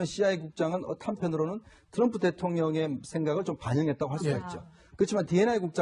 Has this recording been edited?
yes; 1 cut; at 4.1 s

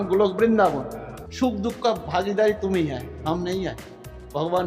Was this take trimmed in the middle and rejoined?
yes; 1 cut; at 1.2 s

